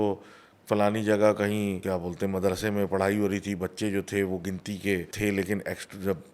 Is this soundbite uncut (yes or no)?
no